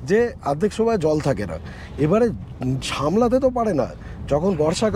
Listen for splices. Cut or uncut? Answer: uncut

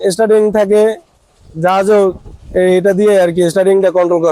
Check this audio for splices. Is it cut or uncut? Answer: uncut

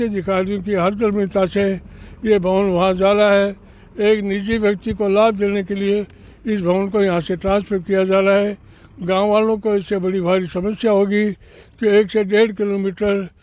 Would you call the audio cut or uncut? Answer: uncut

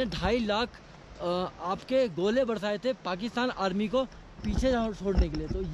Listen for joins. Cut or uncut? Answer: uncut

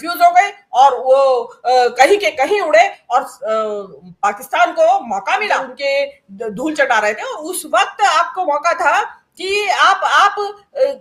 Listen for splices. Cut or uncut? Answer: uncut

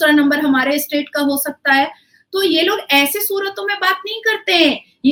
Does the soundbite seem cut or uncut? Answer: uncut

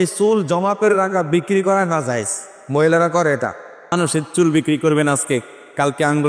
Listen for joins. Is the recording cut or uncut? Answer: cut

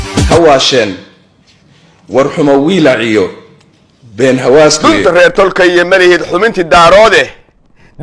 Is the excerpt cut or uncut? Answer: cut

